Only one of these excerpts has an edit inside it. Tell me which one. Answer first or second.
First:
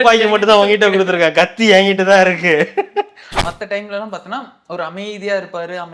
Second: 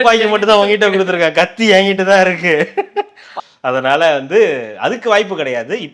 first